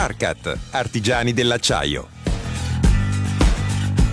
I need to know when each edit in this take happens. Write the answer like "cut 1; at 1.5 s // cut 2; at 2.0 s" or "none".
cut 1; at 2.1 s